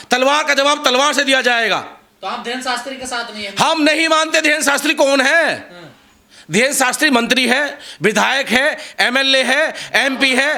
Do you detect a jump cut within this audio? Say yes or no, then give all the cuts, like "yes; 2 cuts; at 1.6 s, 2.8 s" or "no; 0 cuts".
no; 0 cuts